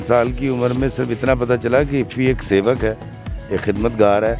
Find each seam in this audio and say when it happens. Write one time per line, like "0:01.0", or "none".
none